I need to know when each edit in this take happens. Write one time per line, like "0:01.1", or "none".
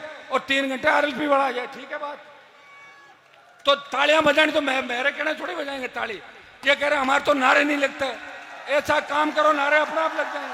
none